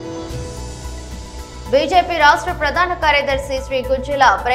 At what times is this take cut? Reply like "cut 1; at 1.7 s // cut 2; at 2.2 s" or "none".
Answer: cut 1; at 1.2 s